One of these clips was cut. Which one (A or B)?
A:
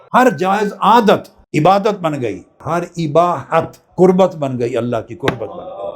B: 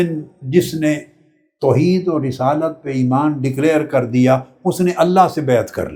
A